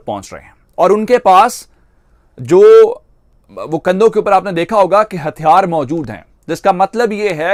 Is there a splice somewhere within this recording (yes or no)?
no